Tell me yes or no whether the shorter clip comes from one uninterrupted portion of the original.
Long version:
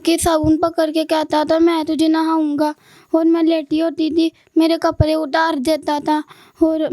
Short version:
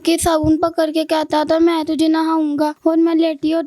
no